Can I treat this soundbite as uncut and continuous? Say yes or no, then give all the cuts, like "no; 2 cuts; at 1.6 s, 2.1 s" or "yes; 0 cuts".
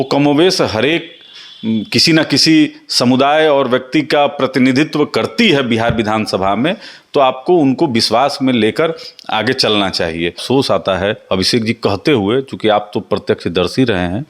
no; 1 cut; at 10.4 s